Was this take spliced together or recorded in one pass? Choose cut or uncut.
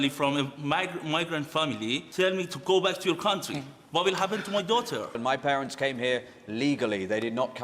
cut